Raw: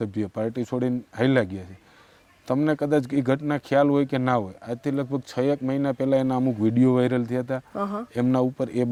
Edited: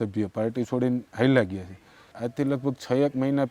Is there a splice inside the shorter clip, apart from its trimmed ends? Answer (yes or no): yes